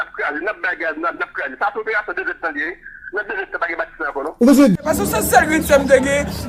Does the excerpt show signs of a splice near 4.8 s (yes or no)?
yes